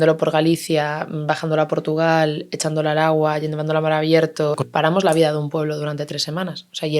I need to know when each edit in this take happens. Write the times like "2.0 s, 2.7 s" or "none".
4.6 s